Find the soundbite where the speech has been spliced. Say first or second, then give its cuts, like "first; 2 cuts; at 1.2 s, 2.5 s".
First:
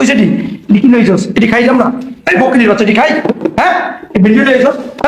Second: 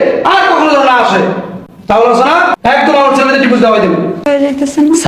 second; 2 cuts; at 2.5 s, 4.3 s